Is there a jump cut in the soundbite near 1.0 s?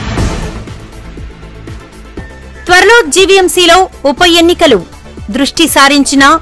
no; 1 cut; at 2.4 s

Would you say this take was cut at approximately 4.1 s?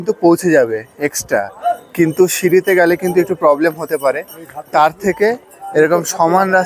no; 0 cuts

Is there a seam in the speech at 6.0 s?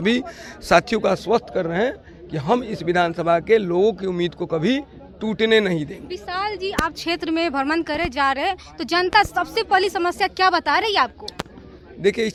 no; 0 cuts

